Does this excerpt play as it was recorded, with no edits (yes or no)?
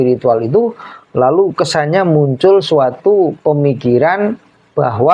yes